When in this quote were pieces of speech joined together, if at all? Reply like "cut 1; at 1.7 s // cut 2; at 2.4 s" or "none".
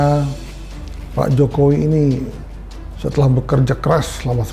none